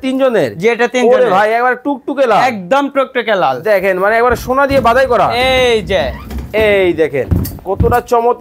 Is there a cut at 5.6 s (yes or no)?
no